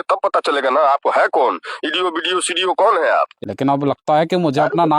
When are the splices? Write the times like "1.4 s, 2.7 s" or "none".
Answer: 3.4 s